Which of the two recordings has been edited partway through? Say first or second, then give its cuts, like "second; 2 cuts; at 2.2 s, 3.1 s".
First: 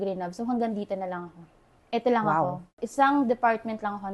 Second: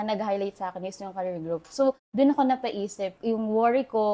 first; 1 cut; at 2.8 s